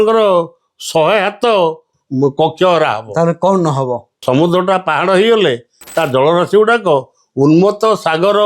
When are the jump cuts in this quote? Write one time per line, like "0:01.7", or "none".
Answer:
0:01.9
0:04.2